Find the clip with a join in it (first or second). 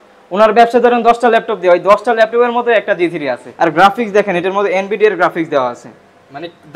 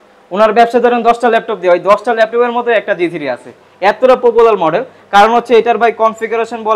first